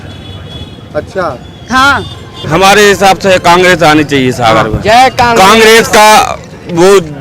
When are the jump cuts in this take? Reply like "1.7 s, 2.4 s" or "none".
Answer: 2.4 s